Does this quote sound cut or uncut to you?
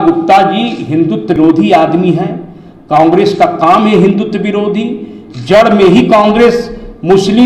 cut